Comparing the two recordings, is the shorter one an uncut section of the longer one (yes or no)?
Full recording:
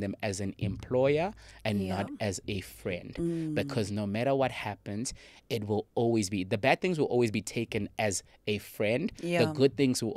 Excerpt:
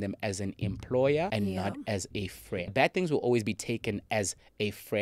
no